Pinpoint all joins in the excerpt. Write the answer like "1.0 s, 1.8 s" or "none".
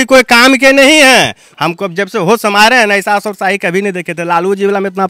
1.4 s